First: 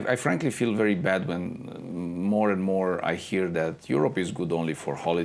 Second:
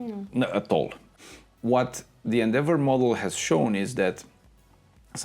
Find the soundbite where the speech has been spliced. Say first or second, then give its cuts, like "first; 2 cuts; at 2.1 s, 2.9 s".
second; 1 cut; at 1.1 s